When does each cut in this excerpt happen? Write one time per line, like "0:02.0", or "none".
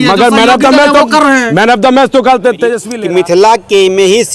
0:02.8